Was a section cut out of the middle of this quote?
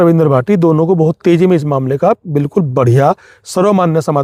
no; 0 cuts

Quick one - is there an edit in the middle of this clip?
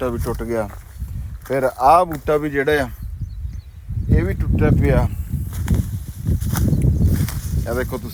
no; 0 cuts

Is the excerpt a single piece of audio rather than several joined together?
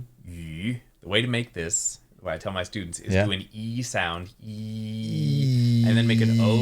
no; 1 cut; at 0.9 s

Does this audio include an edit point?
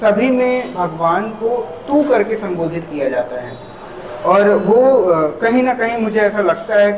no; 0 cuts

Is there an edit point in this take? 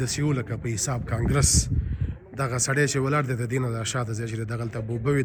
no; 0 cuts

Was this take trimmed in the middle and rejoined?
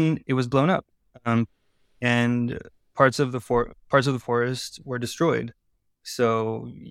no; 0 cuts

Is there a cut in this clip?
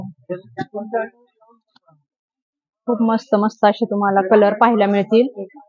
no; 0 cuts

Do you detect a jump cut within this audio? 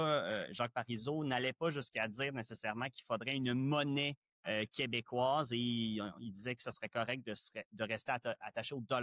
no; 0 cuts

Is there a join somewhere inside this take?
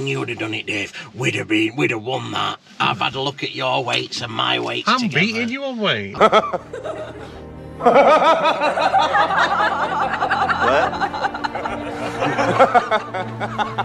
no; 0 cuts

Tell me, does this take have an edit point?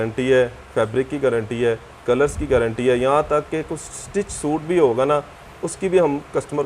no; 0 cuts

